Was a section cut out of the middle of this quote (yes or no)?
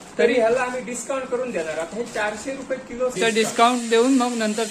yes